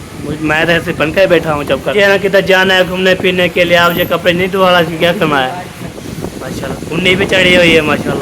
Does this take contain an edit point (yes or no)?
yes